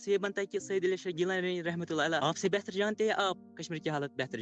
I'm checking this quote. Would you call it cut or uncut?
cut